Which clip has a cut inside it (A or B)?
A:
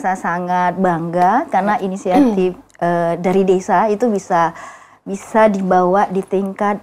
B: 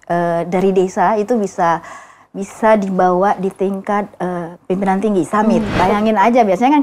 B